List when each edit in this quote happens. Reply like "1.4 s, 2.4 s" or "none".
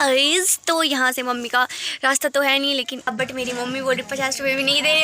3.1 s